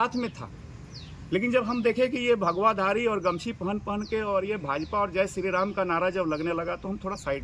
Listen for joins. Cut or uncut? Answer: uncut